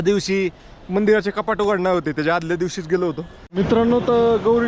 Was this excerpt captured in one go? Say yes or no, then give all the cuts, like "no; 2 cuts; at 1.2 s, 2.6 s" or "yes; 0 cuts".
no; 1 cut; at 3.5 s